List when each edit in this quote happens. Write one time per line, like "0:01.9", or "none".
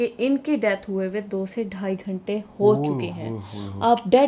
none